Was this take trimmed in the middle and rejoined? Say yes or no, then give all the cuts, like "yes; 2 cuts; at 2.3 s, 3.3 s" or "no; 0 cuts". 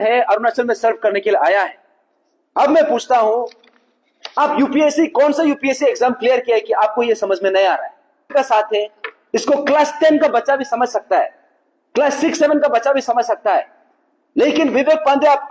yes; 1 cut; at 8.3 s